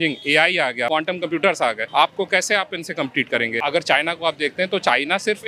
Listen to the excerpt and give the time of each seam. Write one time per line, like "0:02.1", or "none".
0:00.9
0:01.8
0:03.6